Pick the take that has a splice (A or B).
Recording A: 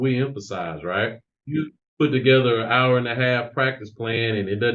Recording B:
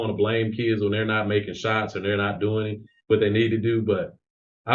A